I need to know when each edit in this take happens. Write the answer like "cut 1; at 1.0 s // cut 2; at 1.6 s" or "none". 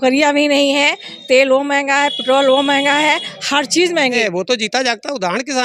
cut 1; at 4.1 s